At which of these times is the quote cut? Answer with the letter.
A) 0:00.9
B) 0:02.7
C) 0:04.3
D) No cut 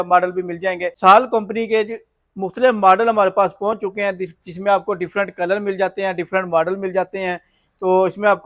A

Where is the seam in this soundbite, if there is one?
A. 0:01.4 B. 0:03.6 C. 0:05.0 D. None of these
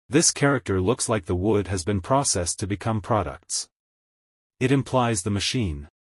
A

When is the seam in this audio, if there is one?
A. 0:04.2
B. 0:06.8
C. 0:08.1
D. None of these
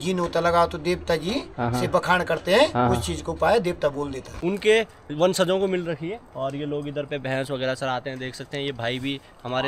A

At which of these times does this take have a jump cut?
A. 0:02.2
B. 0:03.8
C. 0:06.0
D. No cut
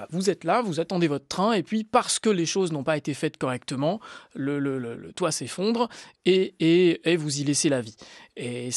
D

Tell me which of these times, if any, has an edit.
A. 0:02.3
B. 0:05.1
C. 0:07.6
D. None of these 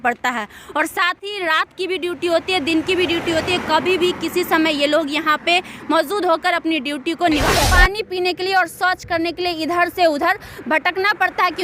C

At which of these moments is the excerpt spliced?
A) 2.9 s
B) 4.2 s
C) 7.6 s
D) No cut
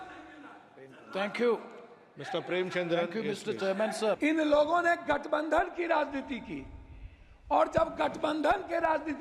B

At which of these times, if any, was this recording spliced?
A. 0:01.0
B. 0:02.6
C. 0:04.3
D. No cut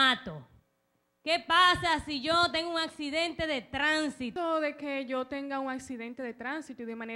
C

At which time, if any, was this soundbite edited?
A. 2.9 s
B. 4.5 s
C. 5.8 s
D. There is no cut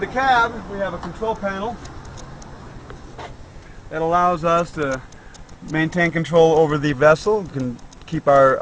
C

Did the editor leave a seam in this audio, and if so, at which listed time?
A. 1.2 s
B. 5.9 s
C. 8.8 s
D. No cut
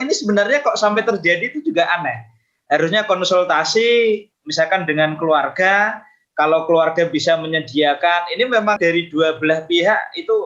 C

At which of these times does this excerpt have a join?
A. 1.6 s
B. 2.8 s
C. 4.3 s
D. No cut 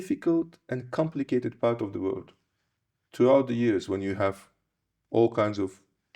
D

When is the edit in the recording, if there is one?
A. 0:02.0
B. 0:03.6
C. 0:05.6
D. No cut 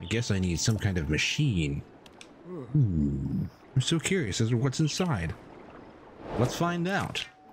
B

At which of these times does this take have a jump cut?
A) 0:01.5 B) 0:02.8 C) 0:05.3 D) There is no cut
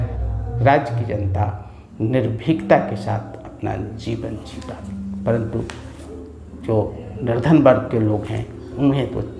D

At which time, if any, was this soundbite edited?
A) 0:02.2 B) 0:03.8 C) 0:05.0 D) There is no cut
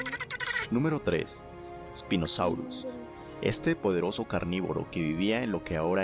D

